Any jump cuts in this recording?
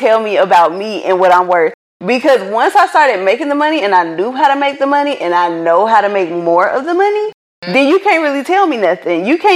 no; 0 cuts

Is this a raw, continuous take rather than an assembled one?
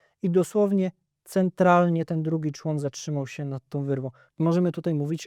no; 1 cut; at 4.2 s

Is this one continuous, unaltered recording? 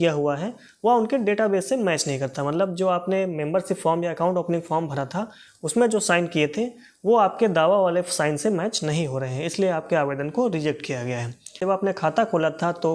no; 1 cut; at 11.6 s

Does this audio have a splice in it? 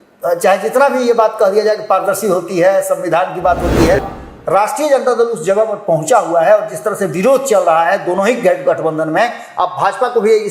yes; 1 cut; at 4.0 s

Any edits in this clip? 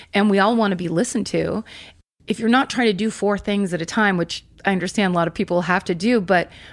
yes; 2 cuts; at 1.9 s, 4.4 s

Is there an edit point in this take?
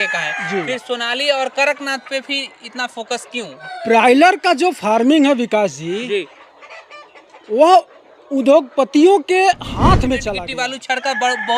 yes; 2 cuts; at 3.6 s, 10.4 s

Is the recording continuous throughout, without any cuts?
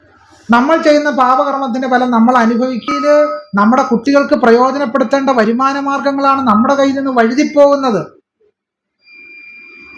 no; 1 cut; at 2.9 s

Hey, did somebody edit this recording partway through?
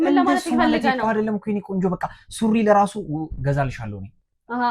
no; 0 cuts

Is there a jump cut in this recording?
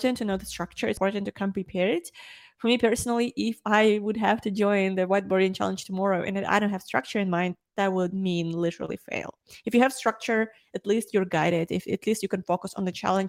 yes; 1 cut; at 1.0 s

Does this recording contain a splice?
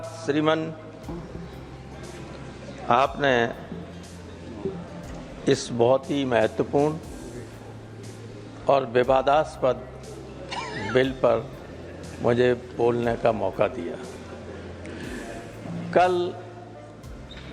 no; 0 cuts

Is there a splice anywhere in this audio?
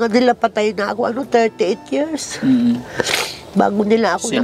no; 0 cuts

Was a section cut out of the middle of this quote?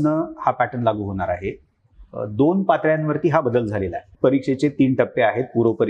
yes; 1 cut; at 4.0 s

